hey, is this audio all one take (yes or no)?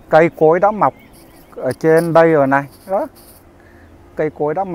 yes